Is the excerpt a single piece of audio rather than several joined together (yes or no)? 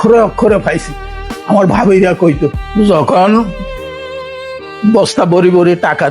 no